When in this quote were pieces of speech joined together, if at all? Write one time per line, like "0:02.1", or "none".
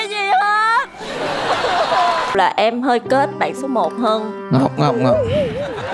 0:02.3